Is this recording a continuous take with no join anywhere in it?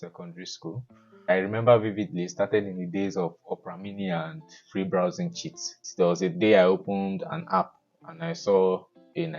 no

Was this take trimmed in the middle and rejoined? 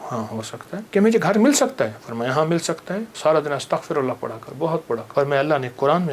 yes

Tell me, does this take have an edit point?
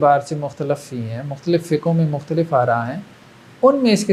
no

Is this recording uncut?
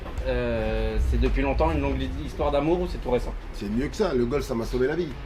yes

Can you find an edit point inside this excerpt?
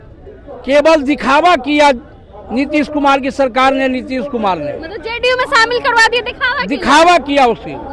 no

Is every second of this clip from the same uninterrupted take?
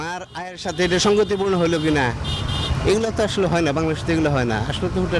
yes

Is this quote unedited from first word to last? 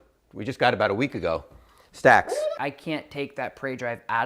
no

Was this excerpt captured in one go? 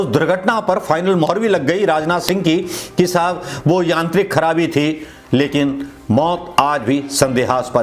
yes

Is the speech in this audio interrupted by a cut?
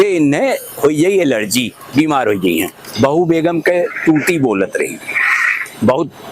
yes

